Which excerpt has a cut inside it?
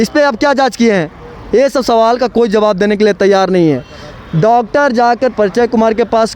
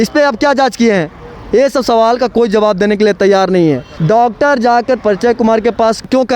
second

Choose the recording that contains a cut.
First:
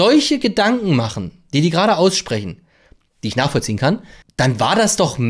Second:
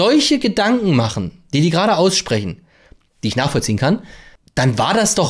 first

